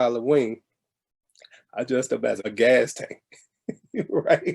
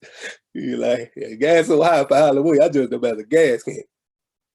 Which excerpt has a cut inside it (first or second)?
first